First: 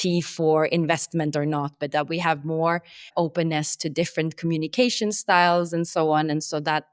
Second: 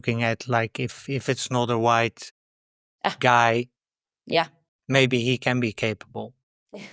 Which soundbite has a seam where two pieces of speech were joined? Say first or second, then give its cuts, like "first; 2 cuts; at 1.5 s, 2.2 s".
first; 1 cut; at 3.1 s